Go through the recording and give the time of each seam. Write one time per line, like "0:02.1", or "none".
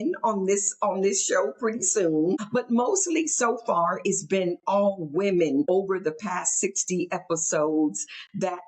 0:02.4
0:05.7